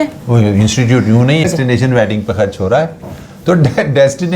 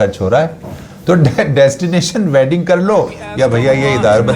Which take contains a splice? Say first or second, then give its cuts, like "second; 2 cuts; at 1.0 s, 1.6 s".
first; 1 cut; at 1.4 s